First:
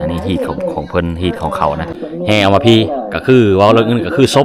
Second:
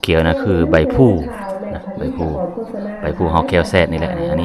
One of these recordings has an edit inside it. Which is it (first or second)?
first